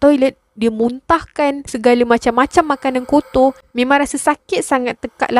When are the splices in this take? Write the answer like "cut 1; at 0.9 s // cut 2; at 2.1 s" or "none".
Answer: cut 1; at 3.6 s